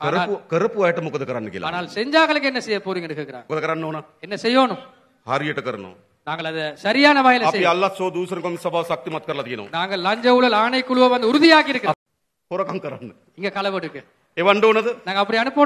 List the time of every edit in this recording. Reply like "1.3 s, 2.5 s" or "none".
3.4 s, 12.0 s